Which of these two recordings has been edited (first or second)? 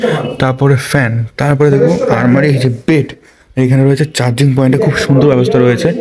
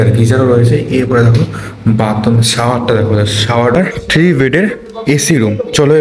second